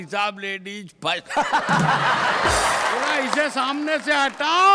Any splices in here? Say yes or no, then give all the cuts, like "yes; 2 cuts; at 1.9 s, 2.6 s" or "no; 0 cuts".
yes; 1 cut; at 3.1 s